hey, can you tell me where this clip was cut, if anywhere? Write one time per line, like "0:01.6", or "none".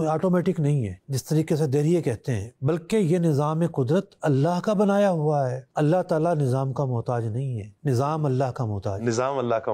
0:01.0
0:05.6